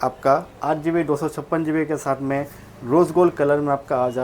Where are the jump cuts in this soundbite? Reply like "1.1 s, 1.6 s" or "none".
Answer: none